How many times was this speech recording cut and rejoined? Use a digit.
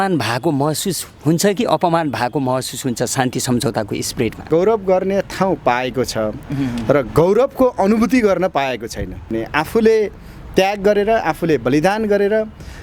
2